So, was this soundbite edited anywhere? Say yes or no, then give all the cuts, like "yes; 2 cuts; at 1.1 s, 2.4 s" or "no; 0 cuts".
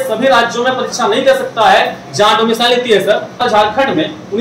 yes; 1 cut; at 3.4 s